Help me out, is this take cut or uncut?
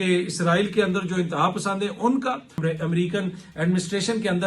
cut